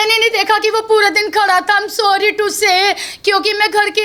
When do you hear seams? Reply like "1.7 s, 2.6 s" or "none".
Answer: none